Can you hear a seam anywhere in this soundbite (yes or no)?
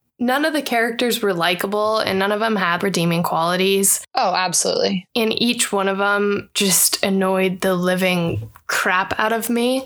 no